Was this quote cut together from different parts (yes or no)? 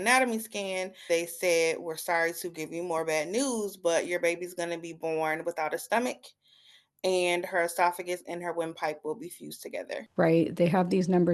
yes